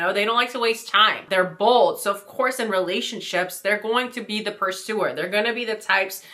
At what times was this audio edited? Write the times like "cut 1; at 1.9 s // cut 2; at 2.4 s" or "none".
cut 1; at 1.2 s

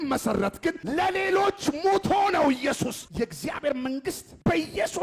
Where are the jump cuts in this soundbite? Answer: cut 1; at 0.8 s // cut 2; at 3.0 s

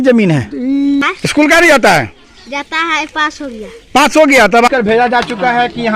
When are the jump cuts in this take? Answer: cut 1; at 1.1 s // cut 2; at 4.7 s

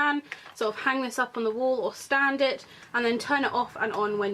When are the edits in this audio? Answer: none

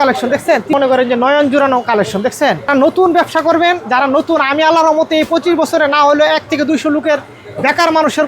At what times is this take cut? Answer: cut 1; at 0.7 s // cut 2; at 2.7 s

